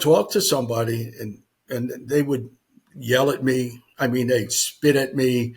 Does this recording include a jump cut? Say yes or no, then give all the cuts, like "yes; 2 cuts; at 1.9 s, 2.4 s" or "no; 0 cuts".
no; 0 cuts